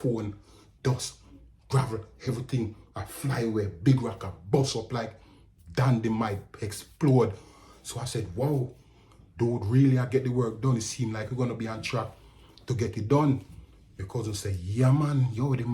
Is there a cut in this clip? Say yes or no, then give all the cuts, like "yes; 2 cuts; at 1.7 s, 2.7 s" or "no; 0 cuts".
no; 0 cuts